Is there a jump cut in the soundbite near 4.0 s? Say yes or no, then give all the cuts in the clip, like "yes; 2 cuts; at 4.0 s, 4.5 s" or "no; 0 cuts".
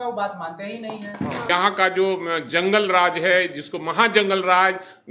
no; 1 cut; at 1.5 s